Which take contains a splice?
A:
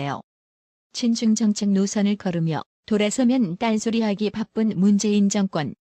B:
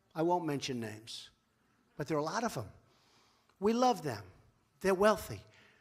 A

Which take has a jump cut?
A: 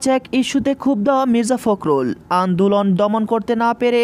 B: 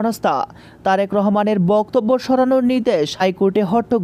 B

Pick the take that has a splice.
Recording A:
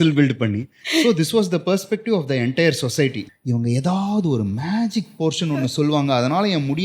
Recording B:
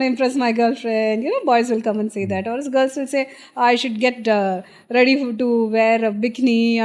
A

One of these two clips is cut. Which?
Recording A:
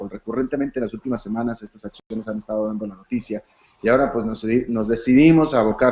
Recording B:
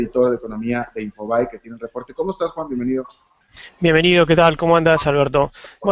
B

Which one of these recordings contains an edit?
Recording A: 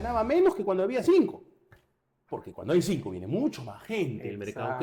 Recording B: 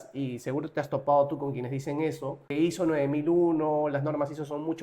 B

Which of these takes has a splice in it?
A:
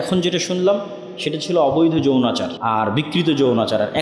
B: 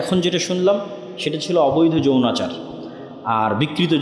A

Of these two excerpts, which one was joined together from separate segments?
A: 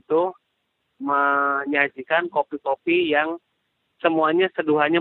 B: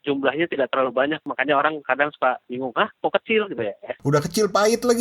B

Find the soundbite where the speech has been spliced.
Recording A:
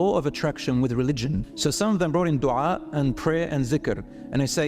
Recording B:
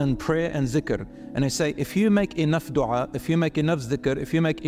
A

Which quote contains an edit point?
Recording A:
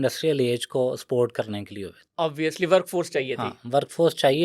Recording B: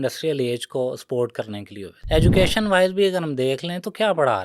B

